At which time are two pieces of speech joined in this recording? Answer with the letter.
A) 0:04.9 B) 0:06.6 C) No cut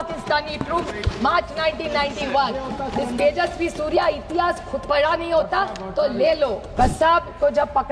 B